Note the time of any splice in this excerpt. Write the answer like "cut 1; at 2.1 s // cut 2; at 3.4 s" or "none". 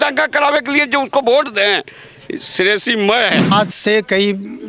cut 1; at 3.5 s